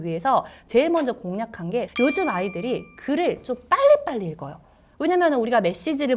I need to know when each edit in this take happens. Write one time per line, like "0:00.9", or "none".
0:01.9